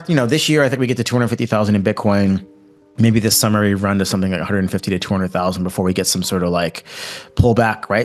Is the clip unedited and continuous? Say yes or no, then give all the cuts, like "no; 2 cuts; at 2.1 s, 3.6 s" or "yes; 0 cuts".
yes; 0 cuts